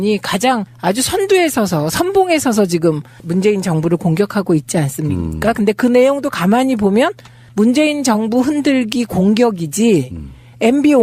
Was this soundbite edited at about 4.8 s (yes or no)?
yes